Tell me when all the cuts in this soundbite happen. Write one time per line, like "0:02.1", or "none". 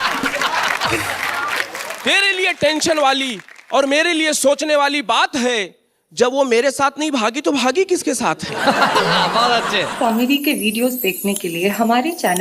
0:09.9